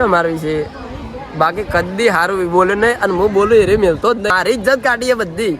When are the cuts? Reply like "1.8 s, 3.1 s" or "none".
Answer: 4.3 s